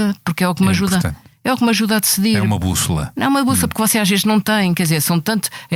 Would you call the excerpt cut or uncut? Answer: uncut